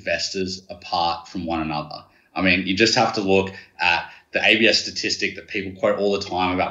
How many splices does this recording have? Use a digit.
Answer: 0